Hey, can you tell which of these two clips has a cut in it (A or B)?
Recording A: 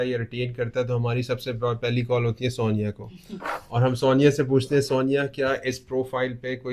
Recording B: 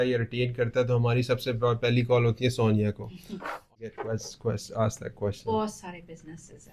B